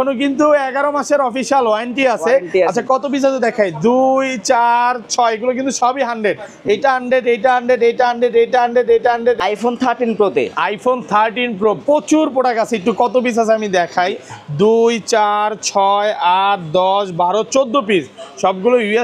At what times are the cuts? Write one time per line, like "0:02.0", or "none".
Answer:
0:09.4